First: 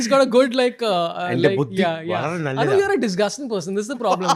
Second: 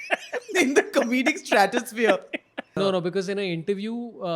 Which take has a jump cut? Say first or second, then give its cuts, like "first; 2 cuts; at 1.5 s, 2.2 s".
second; 1 cut; at 2.6 s